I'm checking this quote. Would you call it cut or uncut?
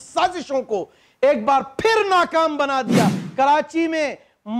cut